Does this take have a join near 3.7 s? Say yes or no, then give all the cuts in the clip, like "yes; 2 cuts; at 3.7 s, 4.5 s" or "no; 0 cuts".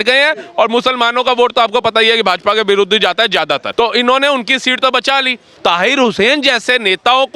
yes; 2 cuts; at 3.7 s, 5.4 s